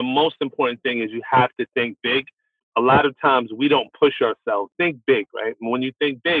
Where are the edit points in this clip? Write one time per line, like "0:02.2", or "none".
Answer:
0:04.7